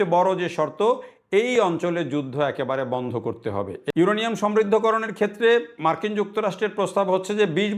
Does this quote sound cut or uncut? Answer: cut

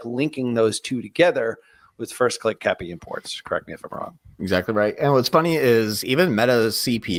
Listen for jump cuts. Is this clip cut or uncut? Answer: uncut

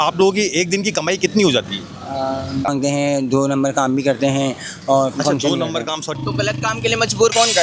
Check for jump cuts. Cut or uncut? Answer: cut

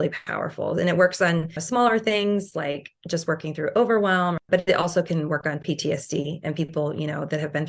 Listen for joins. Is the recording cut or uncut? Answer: cut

